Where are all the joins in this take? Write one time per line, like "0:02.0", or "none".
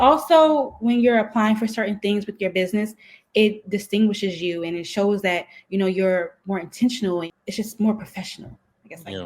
0:07.3